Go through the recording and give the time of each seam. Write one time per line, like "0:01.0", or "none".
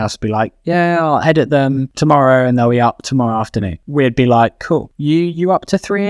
0:01.9
0:03.8
0:04.9